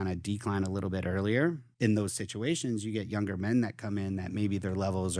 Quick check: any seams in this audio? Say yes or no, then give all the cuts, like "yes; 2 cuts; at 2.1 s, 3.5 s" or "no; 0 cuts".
yes; 1 cut; at 1.7 s